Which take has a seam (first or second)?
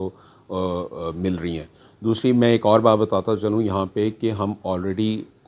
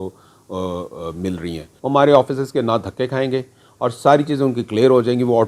second